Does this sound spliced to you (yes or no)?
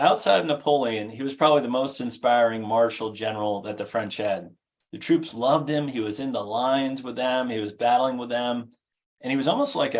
no